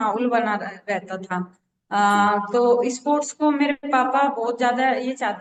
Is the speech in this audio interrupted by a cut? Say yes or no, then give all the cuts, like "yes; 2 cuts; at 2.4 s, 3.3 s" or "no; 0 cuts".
no; 0 cuts